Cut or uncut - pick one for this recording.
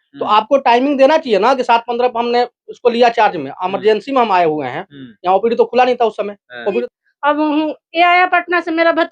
cut